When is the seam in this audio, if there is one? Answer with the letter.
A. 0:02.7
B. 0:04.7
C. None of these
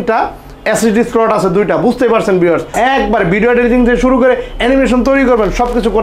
A